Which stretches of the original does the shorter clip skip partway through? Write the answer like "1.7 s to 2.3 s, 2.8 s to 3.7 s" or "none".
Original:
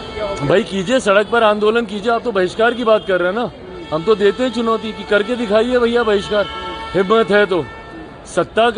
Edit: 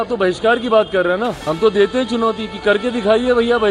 3.6 s to 3.9 s